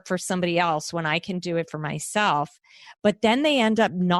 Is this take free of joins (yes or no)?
yes